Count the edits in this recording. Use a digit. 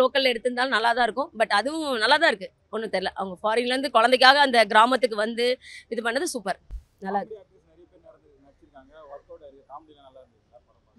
0